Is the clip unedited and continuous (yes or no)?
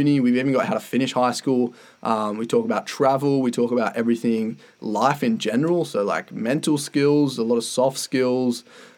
yes